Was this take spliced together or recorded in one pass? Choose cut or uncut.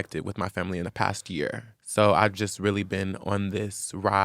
cut